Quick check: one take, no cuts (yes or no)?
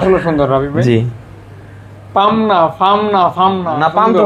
yes